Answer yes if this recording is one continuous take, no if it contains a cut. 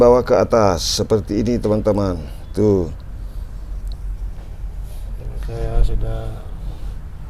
yes